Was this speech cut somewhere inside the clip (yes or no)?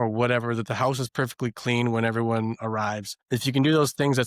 no